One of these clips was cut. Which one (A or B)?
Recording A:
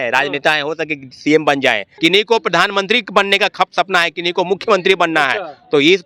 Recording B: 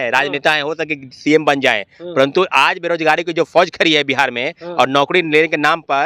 A